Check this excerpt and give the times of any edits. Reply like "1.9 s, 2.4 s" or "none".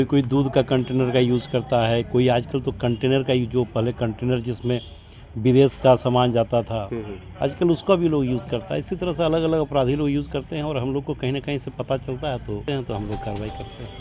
12.6 s